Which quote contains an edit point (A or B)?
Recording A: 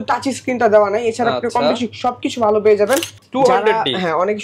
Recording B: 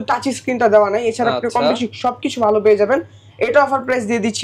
A